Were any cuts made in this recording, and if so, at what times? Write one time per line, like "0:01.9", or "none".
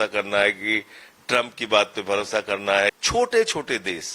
0:03.0